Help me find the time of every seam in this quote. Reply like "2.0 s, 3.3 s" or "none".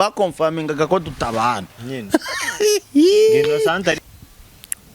4.0 s